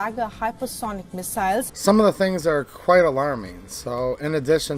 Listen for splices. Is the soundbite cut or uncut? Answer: cut